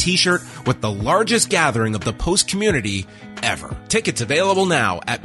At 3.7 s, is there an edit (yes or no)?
yes